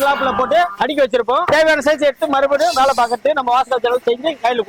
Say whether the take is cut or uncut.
cut